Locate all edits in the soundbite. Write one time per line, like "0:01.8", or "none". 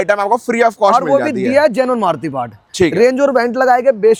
none